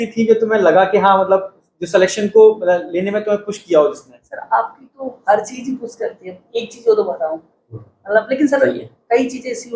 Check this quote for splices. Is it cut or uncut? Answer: uncut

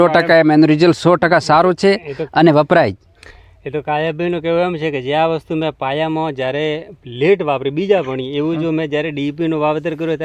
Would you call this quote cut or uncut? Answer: uncut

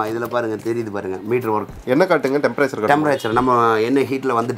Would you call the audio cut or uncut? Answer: uncut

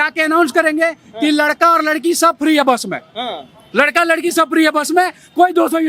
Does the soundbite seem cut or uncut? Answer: uncut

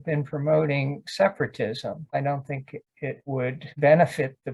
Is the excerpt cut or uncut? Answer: cut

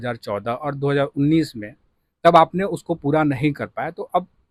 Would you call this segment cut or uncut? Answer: uncut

